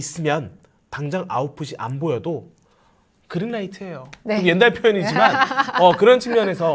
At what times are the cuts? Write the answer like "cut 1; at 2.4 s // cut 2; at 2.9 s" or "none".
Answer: none